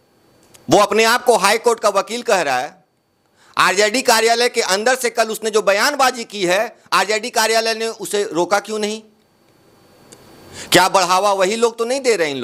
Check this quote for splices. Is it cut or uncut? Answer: uncut